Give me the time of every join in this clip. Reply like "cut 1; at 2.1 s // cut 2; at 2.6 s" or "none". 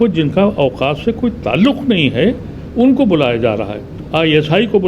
cut 1; at 4.0 s